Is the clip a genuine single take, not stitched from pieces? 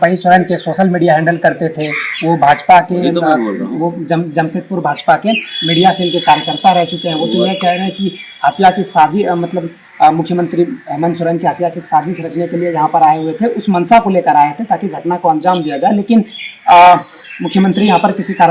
yes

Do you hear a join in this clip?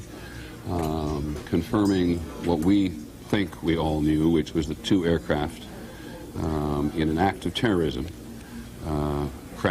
no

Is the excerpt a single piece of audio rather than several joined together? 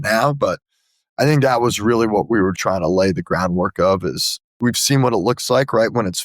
no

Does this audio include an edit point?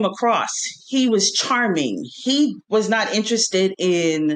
no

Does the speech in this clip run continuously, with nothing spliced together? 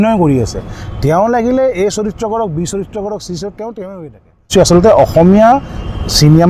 no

